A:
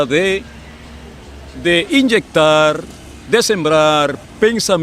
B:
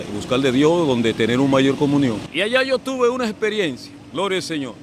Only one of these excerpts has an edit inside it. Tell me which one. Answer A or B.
B